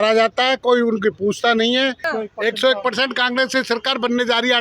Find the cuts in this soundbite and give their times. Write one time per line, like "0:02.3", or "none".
0:02.1